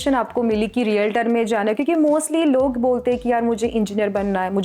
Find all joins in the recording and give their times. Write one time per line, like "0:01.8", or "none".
none